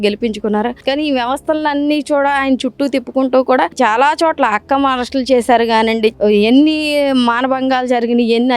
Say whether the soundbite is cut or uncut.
cut